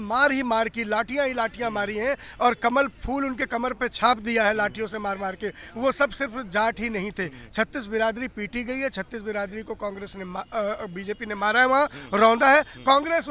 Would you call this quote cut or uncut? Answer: uncut